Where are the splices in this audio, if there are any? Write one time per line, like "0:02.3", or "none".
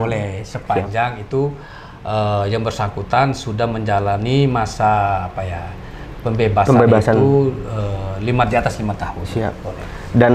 none